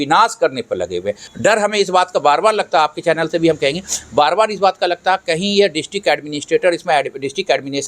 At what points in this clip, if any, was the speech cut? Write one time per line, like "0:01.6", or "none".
0:01.2

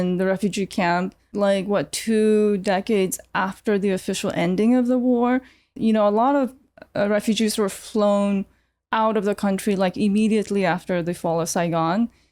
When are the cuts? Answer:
0:01.3
0:05.7

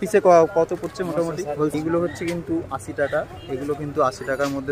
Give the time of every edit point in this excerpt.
0:01.7

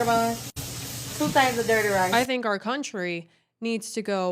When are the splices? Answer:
0:02.1

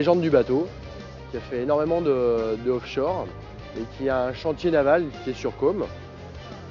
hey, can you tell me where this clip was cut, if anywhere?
none

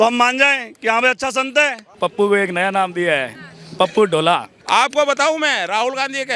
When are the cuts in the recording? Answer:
0:01.8
0:04.5

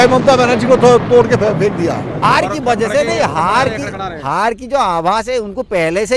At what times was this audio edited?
0:02.2

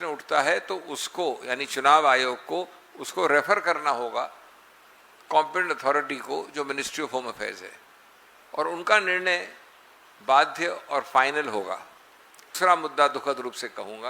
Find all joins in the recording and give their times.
0:12.5

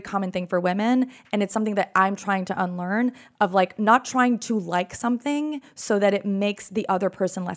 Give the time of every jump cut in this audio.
none

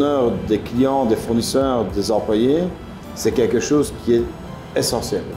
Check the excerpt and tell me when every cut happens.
none

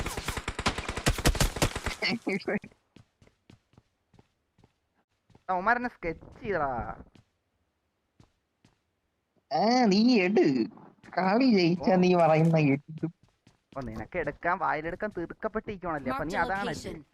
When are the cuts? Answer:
0:05.2

